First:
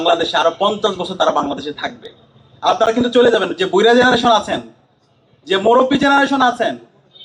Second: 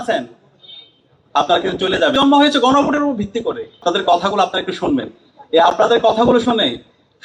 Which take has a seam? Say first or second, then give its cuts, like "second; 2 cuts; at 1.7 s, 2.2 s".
second; 2 cuts; at 2.1 s, 3.8 s